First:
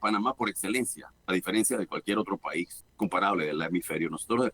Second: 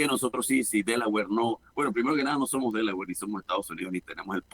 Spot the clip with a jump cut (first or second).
first